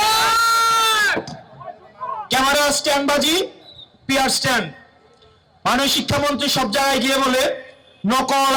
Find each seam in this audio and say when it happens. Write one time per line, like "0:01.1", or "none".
none

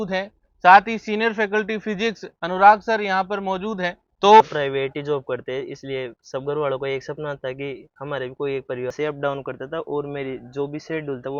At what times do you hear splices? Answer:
0:04.4
0:08.9

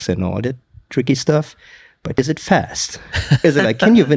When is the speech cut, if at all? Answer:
0:02.2

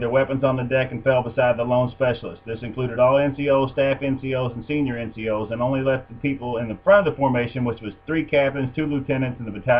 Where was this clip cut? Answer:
0:04.3

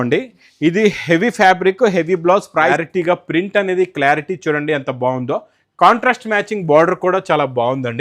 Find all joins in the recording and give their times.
0:02.7

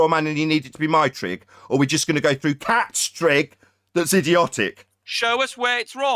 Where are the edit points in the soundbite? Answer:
none

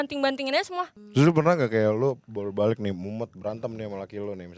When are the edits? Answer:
0:01.0

